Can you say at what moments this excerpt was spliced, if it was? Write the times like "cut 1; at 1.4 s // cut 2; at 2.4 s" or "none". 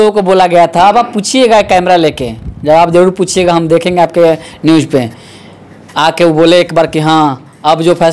none